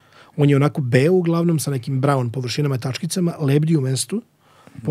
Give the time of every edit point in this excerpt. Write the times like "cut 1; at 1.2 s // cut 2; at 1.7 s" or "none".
none